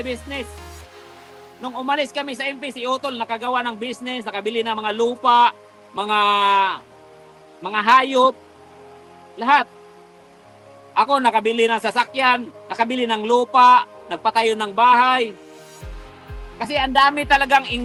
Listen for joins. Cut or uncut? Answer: uncut